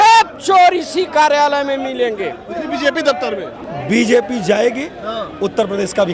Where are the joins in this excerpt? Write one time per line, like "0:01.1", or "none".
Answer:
0:03.5